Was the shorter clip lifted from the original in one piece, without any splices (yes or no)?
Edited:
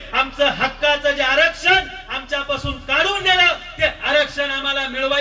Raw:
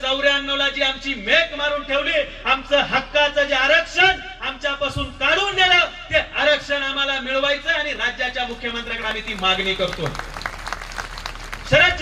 yes